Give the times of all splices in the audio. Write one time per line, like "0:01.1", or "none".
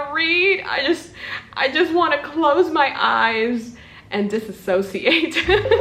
none